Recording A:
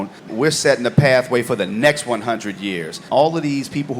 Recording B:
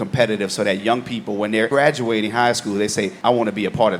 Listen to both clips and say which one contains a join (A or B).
A